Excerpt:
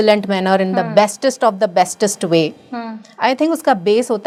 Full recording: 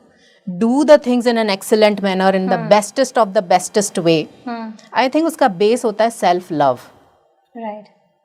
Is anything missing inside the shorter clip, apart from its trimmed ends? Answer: no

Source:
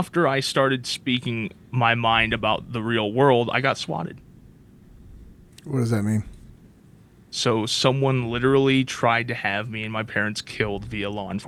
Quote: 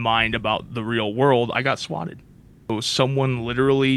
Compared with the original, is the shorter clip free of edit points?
no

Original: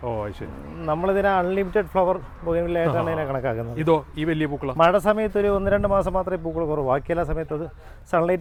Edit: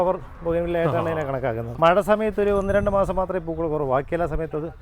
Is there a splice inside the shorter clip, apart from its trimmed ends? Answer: yes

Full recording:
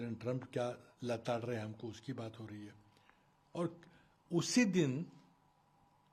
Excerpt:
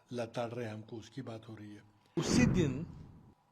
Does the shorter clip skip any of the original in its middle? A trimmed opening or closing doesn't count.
yes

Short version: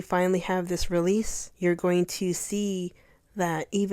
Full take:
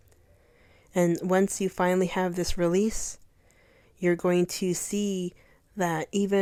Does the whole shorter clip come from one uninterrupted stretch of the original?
no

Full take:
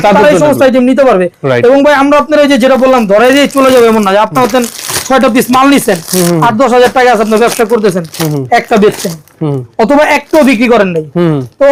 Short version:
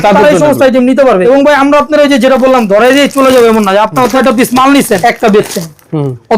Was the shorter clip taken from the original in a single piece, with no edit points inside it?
no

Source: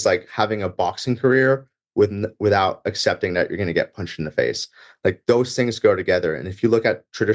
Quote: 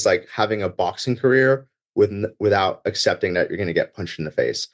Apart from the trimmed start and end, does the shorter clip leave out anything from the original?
no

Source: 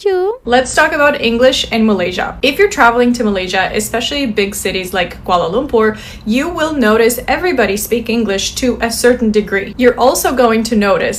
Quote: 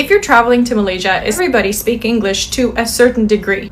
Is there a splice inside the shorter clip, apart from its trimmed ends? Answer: yes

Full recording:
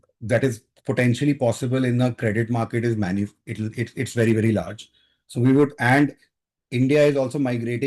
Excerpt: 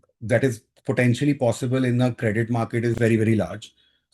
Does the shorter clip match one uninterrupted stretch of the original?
no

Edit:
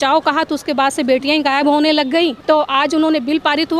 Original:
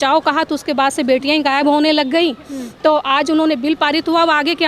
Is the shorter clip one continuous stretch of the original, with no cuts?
no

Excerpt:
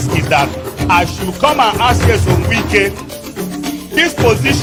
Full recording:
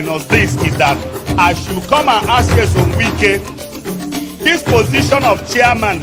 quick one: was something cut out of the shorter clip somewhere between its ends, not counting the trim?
no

